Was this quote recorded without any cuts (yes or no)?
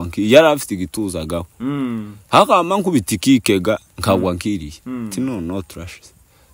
yes